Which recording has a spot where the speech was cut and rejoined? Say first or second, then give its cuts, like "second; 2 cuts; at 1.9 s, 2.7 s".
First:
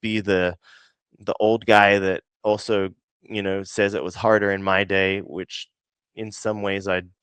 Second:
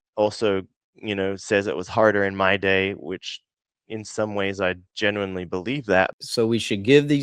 second; 1 cut; at 6.1 s